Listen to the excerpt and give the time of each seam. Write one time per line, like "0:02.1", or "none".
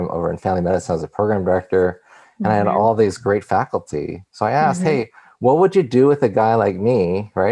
none